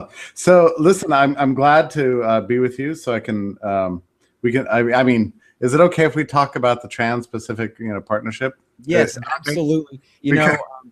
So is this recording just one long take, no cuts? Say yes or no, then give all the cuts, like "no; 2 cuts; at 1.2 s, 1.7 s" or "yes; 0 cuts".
no; 1 cut; at 4.9 s